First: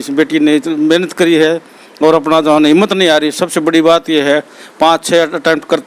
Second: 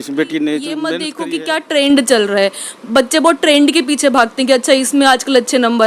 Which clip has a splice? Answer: second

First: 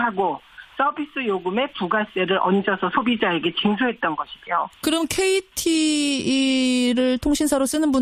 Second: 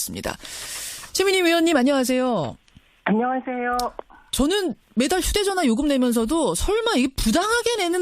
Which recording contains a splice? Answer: second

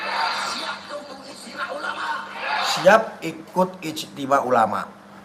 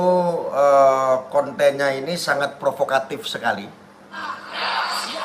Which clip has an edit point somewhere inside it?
second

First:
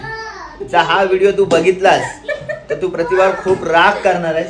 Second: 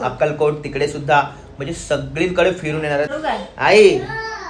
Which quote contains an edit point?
second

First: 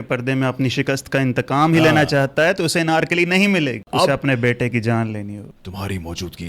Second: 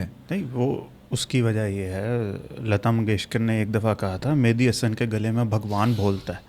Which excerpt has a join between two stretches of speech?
first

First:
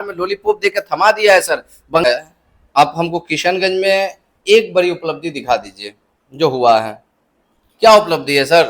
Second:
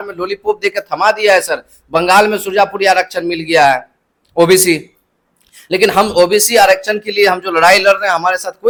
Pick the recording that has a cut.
first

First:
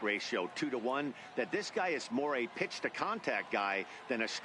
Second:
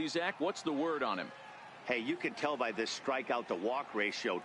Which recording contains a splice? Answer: second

